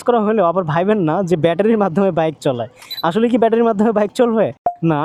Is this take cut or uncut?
uncut